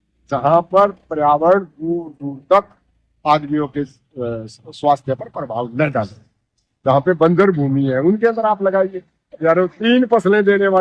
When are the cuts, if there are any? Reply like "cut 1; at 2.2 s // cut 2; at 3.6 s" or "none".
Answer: none